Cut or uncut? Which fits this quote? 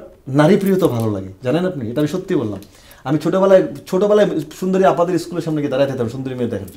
uncut